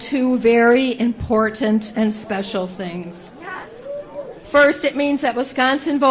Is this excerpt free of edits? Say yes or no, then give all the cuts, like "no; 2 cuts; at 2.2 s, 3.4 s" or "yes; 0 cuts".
yes; 0 cuts